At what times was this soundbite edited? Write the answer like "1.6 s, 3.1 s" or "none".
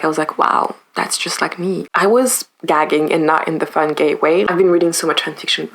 1.9 s, 4.5 s